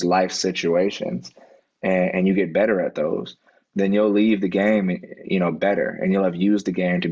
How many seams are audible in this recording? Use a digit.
0